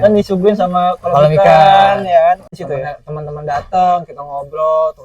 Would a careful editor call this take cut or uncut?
cut